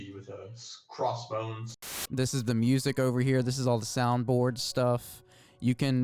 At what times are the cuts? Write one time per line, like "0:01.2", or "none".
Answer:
0:02.0